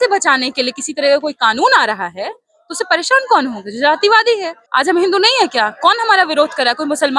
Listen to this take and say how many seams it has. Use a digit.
1